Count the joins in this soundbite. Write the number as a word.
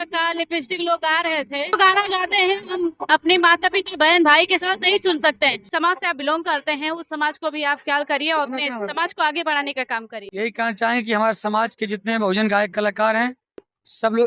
three